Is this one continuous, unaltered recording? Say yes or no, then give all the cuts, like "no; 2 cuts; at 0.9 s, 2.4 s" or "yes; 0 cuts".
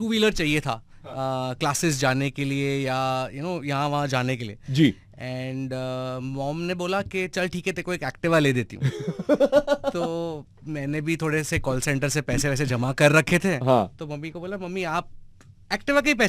yes; 0 cuts